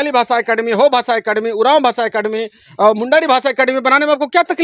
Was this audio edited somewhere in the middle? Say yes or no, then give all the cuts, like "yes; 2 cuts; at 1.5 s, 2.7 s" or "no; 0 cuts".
no; 0 cuts